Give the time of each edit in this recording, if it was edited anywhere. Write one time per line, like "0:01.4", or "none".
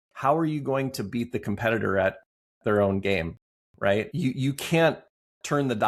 0:04.1